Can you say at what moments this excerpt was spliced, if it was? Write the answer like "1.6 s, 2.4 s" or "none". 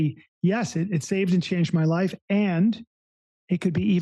none